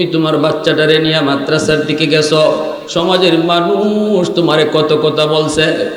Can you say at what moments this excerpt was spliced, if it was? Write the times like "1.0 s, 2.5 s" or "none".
none